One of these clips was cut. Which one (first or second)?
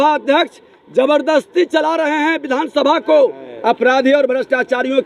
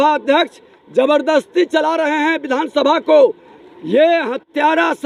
first